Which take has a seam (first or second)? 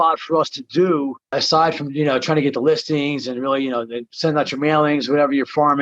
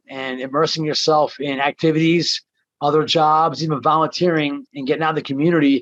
first